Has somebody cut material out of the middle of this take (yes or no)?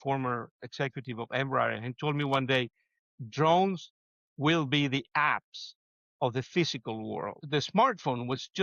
yes